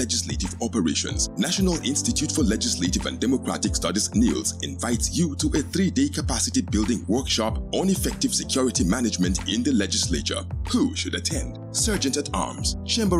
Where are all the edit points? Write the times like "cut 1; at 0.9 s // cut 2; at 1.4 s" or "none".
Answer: none